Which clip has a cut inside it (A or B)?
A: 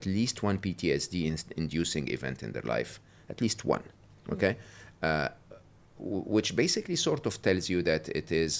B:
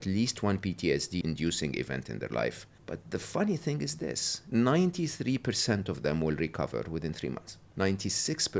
B